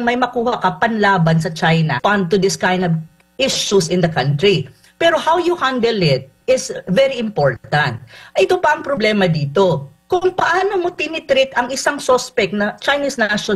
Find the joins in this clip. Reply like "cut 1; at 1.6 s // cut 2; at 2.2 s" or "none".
cut 1; at 1.9 s